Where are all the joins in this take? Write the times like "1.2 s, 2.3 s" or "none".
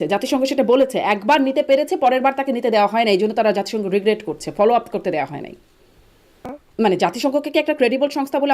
6.5 s

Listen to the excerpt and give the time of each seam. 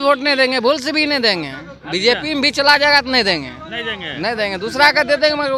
none

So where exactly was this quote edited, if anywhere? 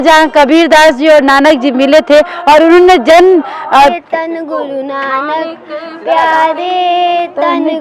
3.9 s

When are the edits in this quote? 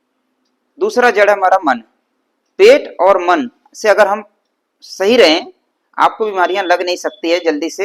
none

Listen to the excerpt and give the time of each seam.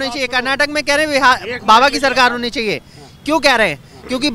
none

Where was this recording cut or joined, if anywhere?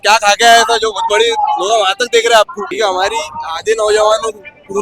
2.6 s

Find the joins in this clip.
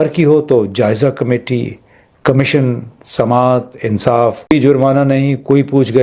4.5 s

